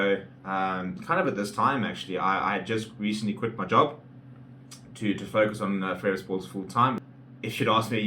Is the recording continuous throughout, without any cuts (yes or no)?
no